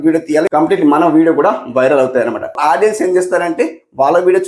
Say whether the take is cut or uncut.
cut